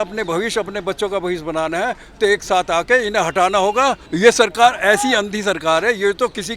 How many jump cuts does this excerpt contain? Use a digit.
1